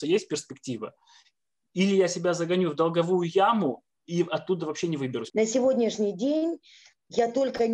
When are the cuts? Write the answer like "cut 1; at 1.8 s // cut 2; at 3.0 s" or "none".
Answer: cut 1; at 5.2 s